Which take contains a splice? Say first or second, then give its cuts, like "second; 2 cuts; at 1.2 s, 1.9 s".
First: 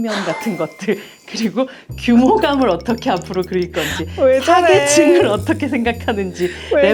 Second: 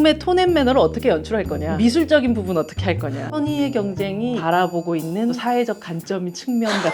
second; 4 cuts; at 1.6 s, 3.2 s, 4.4 s, 5.4 s